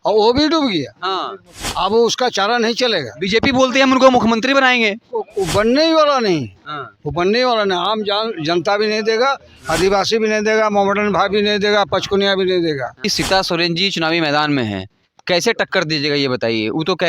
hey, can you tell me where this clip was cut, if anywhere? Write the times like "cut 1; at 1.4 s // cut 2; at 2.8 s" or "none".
cut 1; at 13.1 s